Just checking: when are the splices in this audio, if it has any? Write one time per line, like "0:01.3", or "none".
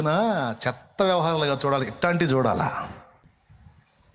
0:03.2

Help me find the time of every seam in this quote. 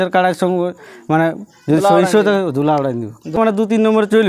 0:03.4

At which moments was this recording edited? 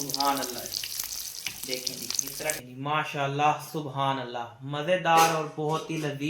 0:02.5

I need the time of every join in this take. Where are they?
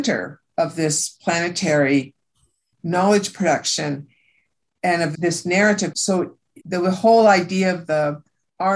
0:06.1

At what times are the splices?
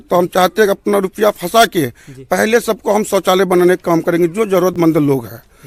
none

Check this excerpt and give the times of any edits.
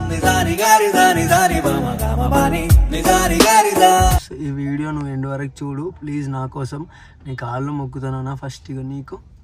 0:04.3

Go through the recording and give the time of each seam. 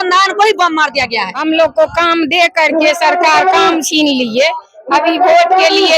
0:01.3

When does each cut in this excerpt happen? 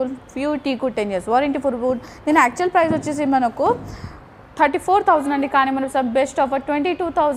none

